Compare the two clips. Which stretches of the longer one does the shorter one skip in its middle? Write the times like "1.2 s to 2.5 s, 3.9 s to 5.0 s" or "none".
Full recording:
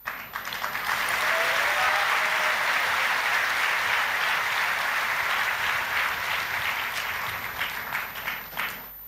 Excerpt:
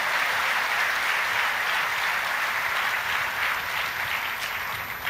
none